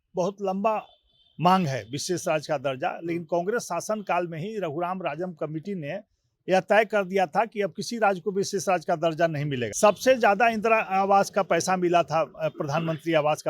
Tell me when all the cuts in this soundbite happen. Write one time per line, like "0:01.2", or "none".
0:09.7